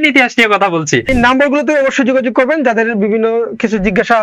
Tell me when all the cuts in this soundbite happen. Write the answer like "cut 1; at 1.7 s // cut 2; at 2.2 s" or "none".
cut 1; at 1.1 s